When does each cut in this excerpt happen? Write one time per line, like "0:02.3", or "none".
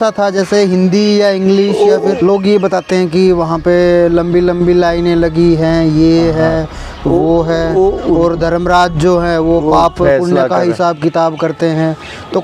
0:02.2